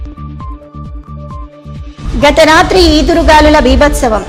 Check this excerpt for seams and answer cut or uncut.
cut